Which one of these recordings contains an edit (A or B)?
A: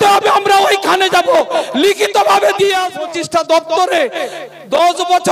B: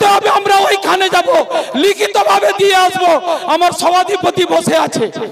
A